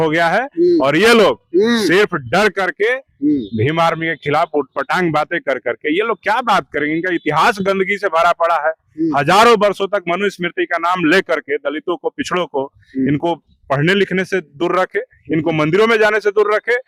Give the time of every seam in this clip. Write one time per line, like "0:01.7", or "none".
none